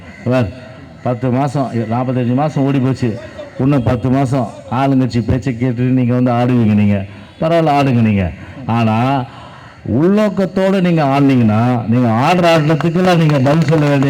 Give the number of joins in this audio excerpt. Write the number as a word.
zero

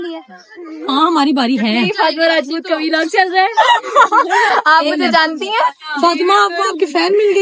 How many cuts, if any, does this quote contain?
zero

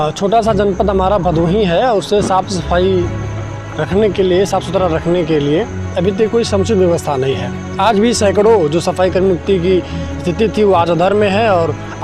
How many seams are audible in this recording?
zero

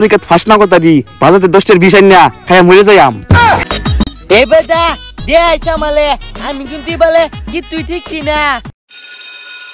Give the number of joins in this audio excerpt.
two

